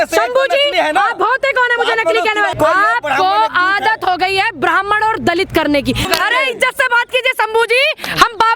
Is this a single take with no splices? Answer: no; 2 cuts; at 2.5 s, 6.0 s

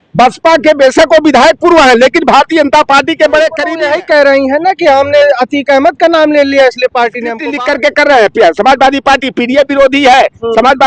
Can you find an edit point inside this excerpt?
yes; 2 cuts; at 3.6 s, 7.4 s

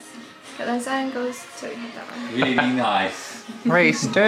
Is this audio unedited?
yes; 0 cuts

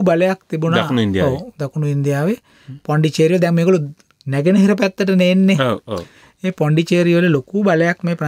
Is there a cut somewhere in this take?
no; 0 cuts

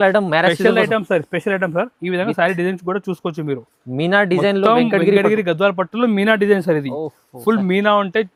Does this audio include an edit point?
no; 0 cuts

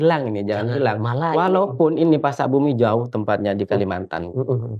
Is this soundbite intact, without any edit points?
yes; 0 cuts

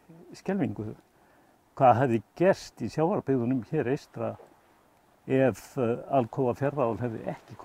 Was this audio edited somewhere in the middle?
no; 0 cuts

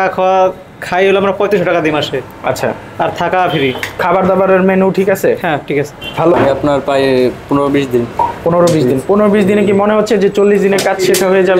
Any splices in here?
yes; 1 cut; at 6.3 s

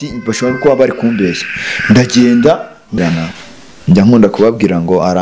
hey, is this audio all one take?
no; 1 cut; at 3.0 s

